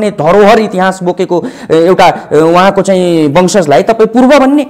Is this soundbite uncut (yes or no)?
yes